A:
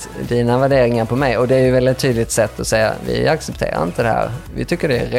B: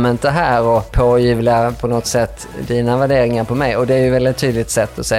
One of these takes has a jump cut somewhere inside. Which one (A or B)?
B